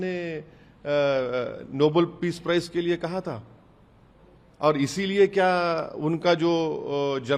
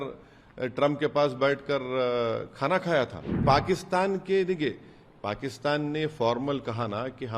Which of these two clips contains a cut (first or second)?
second